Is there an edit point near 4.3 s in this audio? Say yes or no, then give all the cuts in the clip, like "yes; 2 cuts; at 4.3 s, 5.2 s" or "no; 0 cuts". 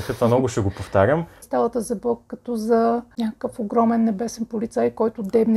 no; 2 cuts; at 1.4 s, 3.1 s